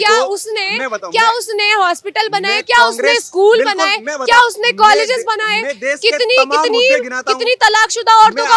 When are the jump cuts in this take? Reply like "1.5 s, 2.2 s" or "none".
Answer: none